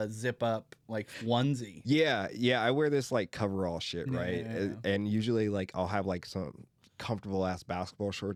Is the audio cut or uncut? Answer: uncut